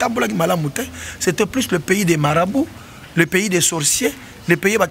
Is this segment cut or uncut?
uncut